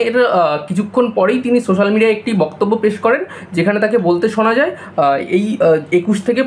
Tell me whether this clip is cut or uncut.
uncut